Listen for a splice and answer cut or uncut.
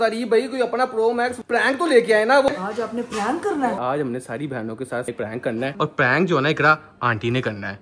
cut